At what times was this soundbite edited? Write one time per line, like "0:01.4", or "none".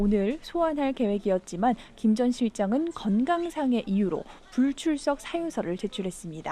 0:03.3